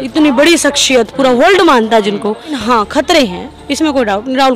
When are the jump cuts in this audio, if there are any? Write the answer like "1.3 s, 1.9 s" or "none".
2.6 s